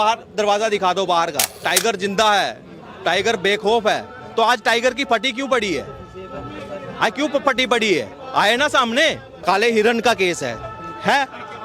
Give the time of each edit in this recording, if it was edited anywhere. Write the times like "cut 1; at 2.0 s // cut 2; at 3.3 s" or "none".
cut 1; at 1.6 s // cut 2; at 9.3 s